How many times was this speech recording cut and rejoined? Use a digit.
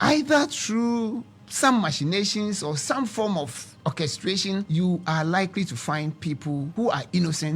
3